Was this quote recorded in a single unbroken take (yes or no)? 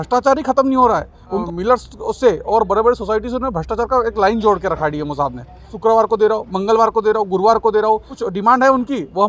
no